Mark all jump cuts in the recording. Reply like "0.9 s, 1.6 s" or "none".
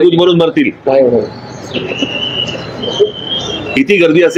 none